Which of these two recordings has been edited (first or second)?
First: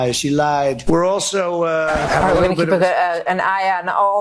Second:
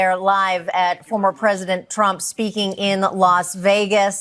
first